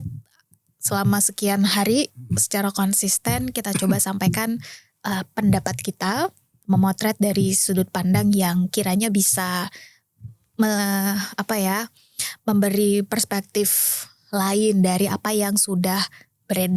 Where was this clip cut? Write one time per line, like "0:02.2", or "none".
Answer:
none